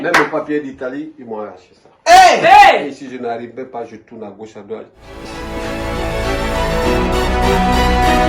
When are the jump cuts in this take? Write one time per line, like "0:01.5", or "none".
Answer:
0:05.0